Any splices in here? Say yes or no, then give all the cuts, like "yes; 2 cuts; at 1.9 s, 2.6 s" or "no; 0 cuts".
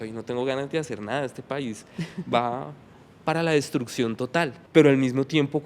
yes; 1 cut; at 4.6 s